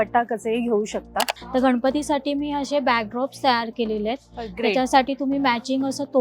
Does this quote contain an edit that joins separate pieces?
yes; 1 cut; at 1.4 s

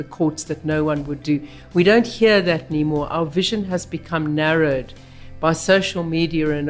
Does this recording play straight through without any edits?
yes; 0 cuts

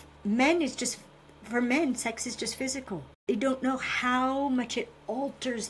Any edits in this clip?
yes; 1 cut; at 3.1 s

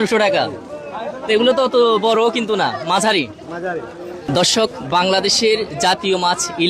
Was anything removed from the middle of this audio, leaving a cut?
yes; 1 cut; at 4.2 s

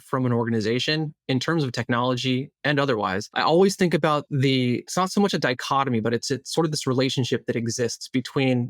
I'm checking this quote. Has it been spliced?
yes; 2 cuts; at 3.3 s, 4.9 s

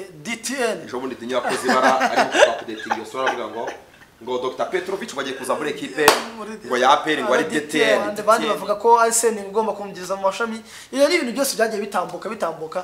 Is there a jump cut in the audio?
yes; 1 cut; at 8.1 s

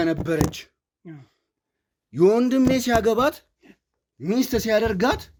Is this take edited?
no; 0 cuts

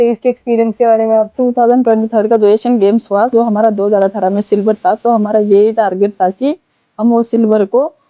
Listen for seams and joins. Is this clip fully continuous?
no; 2 cuts; at 1.3 s, 3.3 s

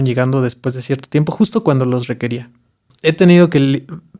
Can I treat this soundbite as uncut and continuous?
no; 1 cut; at 2.9 s

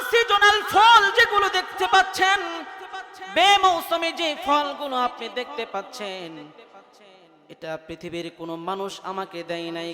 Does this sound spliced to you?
no; 0 cuts

